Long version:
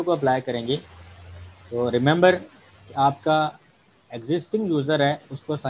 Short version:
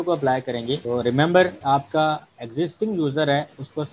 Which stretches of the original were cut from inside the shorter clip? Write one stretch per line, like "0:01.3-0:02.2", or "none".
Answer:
0:00.8-0:01.7
0:02.4-0:02.9
0:03.7-0:04.1